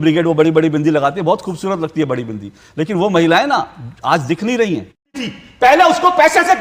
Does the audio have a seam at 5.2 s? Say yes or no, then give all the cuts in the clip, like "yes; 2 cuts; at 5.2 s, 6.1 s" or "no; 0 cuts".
yes; 1 cut; at 5.2 s